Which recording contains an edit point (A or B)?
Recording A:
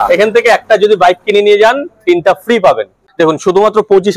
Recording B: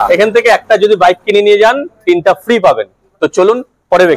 A